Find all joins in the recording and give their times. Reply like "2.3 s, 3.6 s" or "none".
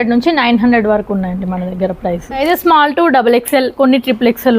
2.4 s